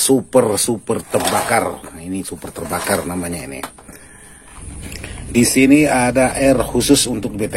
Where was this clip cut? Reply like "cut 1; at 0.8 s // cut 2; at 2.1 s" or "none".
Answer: cut 1; at 4.5 s